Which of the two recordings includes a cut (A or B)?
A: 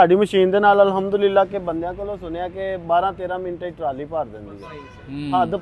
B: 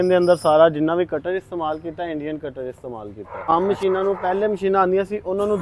B